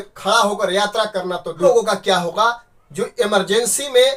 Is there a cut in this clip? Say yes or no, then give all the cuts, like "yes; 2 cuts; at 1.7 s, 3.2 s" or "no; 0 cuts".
yes; 1 cut; at 1.6 s